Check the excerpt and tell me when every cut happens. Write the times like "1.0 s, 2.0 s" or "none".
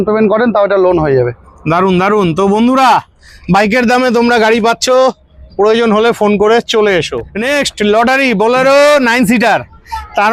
none

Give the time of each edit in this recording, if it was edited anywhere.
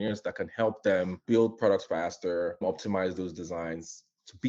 1.2 s, 2.6 s

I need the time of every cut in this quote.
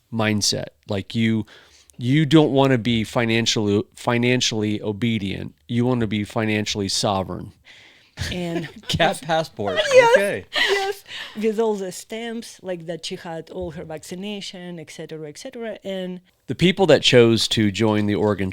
7.6 s, 16.3 s

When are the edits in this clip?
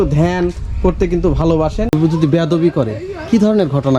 1.9 s

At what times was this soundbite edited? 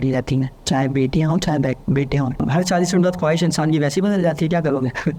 2.4 s

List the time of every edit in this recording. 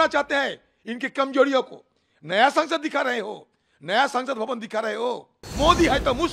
5.4 s

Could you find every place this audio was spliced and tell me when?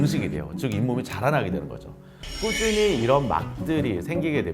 2.2 s

